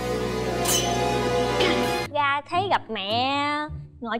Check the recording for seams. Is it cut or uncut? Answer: cut